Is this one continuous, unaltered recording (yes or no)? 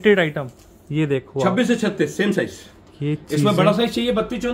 yes